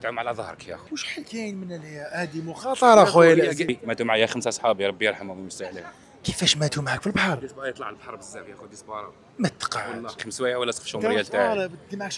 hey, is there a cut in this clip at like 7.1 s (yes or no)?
no